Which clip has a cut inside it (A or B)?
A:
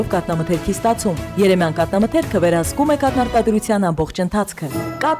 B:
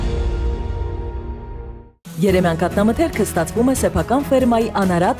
B